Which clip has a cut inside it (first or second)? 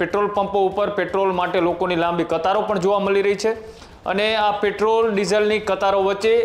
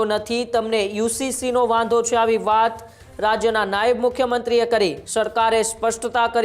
second